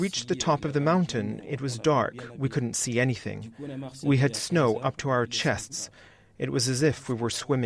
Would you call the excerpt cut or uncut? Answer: uncut